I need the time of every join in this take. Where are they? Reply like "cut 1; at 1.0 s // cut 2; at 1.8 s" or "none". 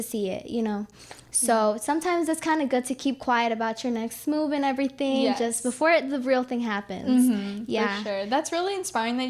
none